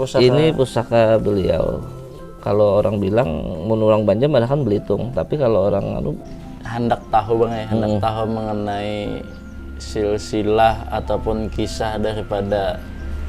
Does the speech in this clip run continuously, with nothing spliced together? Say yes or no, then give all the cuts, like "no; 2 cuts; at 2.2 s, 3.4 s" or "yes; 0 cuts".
no; 1 cut; at 6.2 s